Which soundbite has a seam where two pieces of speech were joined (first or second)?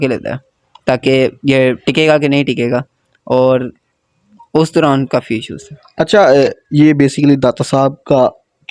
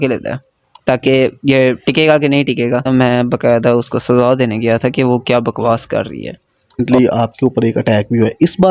second